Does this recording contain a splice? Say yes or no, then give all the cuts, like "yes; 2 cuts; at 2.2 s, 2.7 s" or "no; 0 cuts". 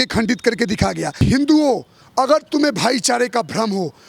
yes; 1 cut; at 1.2 s